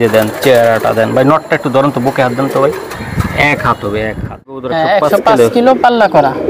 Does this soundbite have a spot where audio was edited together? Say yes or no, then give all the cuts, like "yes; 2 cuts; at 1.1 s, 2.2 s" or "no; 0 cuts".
yes; 1 cut; at 4.7 s